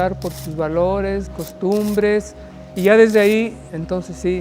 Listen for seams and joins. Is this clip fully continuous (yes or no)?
no